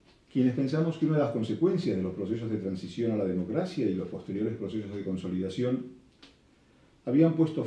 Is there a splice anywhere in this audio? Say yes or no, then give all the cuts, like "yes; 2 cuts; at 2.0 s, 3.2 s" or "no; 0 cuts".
no; 0 cuts